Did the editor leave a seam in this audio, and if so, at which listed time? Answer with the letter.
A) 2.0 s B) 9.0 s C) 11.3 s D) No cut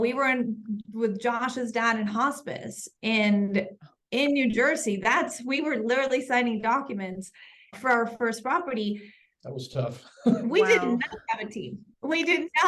D